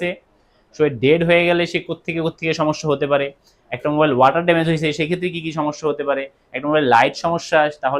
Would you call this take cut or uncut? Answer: uncut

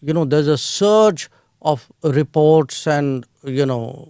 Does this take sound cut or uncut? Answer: uncut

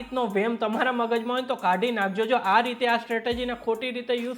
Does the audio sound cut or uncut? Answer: uncut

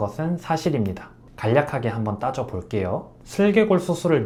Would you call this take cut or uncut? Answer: uncut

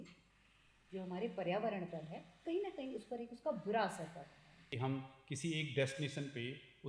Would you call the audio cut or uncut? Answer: cut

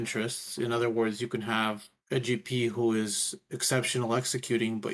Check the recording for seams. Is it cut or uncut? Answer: cut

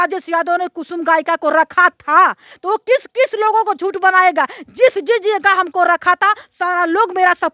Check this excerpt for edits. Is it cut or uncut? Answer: uncut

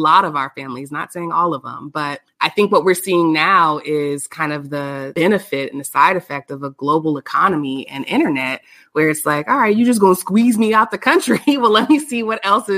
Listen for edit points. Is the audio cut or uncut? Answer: cut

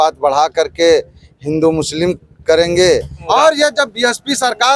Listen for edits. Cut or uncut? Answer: cut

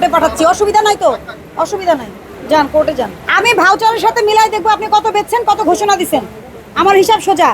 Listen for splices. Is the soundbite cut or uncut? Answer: cut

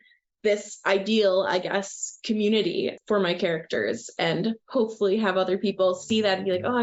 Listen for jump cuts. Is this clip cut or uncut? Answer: uncut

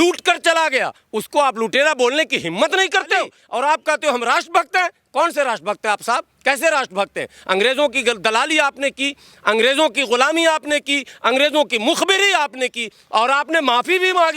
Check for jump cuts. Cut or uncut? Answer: cut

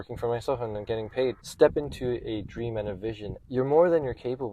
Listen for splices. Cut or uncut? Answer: cut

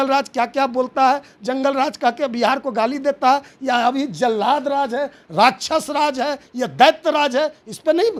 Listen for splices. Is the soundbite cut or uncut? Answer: uncut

